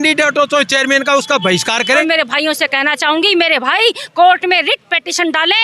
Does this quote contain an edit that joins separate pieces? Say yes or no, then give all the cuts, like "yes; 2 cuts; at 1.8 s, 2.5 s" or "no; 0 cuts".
yes; 1 cut; at 2.0 s